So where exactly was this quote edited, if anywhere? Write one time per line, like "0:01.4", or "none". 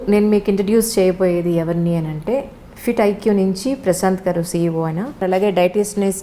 0:05.2